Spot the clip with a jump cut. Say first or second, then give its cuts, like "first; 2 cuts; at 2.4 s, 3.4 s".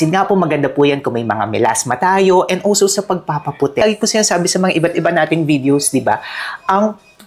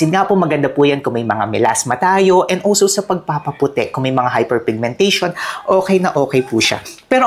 first; 1 cut; at 3.8 s